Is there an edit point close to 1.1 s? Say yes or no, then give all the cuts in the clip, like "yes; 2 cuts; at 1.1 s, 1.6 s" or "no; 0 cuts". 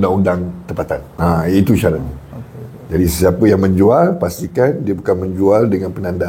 yes; 1 cut; at 1.1 s